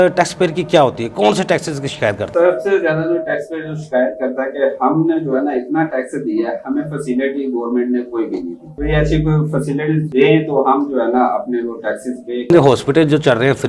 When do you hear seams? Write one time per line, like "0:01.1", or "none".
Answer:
none